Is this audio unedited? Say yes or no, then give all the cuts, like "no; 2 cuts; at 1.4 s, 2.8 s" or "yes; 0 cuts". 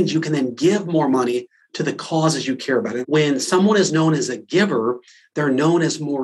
no; 1 cut; at 3.0 s